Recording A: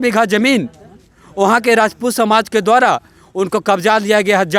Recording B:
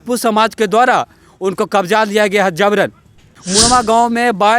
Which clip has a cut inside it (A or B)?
B